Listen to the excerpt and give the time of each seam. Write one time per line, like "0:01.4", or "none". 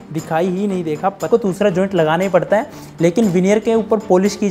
0:01.3